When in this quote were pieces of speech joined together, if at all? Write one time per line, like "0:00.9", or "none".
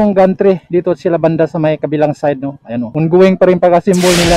0:02.9